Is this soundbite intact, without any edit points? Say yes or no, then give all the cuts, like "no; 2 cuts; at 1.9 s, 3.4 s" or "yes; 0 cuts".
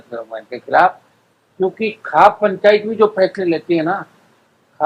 yes; 0 cuts